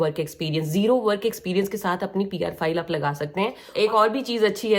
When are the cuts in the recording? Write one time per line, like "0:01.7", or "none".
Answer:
0:03.6